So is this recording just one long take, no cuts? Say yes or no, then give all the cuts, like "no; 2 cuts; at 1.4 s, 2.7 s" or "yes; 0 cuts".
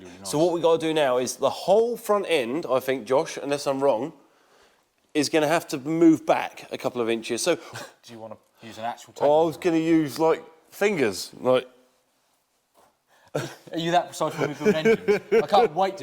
no; 1 cut; at 7.7 s